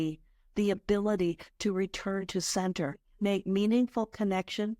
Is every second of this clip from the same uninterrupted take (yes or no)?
no